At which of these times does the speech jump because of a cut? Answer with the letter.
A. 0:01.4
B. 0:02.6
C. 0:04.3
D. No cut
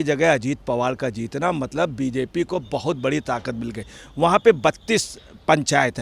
D